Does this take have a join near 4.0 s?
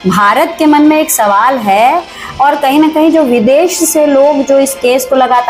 no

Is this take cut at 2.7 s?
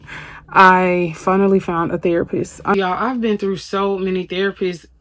yes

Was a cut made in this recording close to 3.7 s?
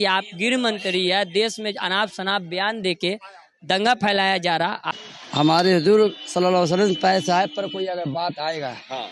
no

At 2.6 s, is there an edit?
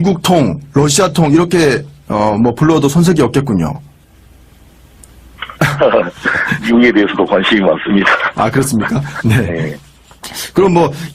yes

